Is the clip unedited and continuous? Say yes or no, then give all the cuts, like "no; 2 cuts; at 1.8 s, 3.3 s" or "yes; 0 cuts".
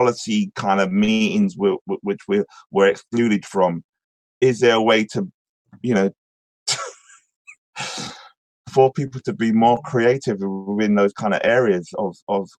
yes; 0 cuts